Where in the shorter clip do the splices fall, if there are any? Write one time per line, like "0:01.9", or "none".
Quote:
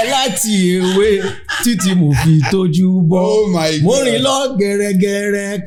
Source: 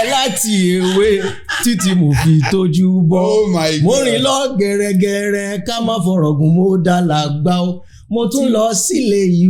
none